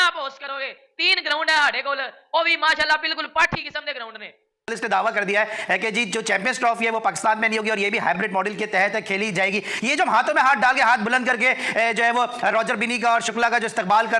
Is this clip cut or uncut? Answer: cut